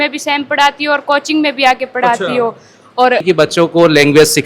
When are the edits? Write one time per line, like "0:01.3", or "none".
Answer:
0:03.2